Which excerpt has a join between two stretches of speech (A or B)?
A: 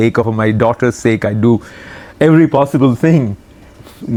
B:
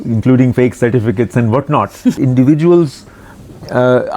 B